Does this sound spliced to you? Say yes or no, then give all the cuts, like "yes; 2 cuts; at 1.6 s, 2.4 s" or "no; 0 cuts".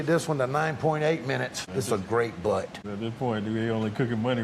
yes; 2 cuts; at 1.6 s, 2.8 s